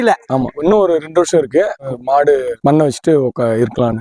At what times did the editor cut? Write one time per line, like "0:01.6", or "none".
0:01.8